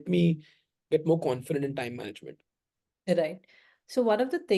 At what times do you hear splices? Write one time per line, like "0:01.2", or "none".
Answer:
none